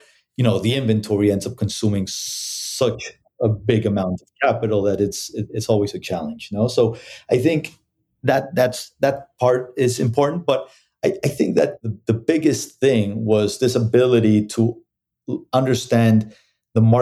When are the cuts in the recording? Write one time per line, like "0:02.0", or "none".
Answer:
0:11.9